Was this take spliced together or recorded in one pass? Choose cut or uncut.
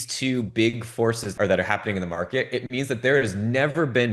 cut